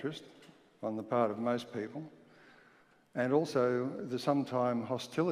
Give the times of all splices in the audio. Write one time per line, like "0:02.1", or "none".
0:03.7